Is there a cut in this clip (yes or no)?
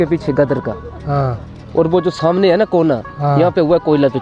no